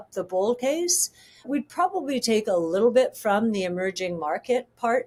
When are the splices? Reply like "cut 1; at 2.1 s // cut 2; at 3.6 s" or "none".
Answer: none